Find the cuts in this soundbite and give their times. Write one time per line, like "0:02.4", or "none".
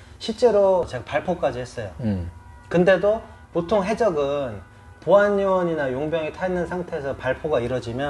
0:00.9